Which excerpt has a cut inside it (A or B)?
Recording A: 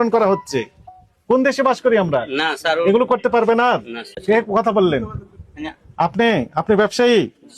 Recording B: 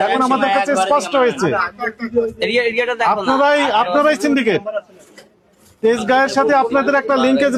A